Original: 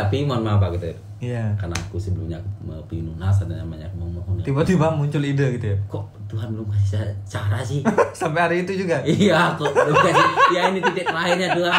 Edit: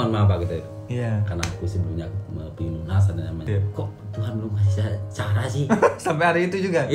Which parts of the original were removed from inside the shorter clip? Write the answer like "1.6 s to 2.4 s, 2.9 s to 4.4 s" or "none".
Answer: 3.8 s to 5.7 s